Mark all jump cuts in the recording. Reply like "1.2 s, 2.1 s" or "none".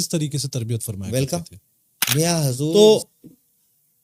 1.0 s